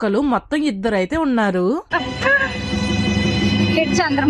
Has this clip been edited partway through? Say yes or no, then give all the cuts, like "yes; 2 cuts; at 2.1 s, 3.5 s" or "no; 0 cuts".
yes; 1 cut; at 1.9 s